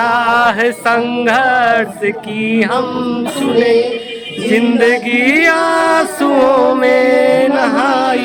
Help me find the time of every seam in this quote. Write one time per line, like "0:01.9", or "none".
none